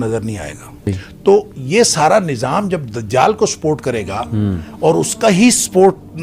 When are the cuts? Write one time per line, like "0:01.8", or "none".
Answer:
0:01.0